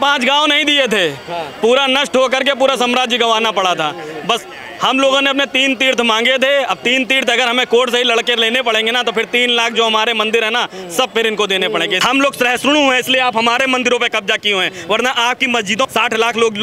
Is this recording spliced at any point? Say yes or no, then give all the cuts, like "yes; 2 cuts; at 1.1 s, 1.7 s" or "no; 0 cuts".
yes; 2 cuts; at 12.0 s, 15.9 s